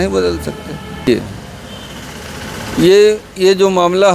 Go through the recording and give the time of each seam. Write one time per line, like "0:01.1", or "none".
0:01.1